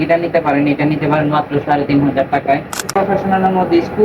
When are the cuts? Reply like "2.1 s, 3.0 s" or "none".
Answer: 2.9 s